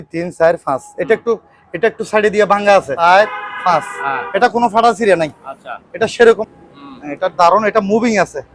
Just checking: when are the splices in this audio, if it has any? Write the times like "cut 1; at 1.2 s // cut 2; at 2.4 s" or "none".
cut 1; at 2.9 s // cut 2; at 6.4 s